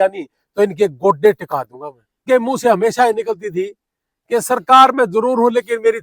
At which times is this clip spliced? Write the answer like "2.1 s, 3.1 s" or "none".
2.2 s